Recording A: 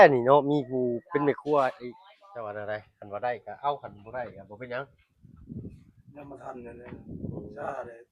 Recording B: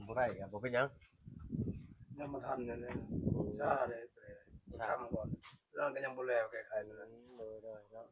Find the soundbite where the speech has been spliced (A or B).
A